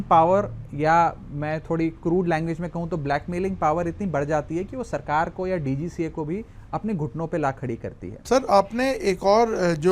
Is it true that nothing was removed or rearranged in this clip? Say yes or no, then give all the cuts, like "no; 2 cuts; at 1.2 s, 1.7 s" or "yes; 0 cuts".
no; 1 cut; at 8.1 s